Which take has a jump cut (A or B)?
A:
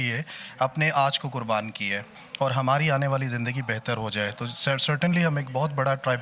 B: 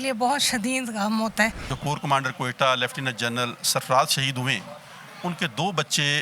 B